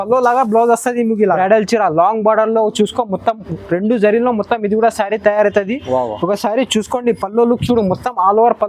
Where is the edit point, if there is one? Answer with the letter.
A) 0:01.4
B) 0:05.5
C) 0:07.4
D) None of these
A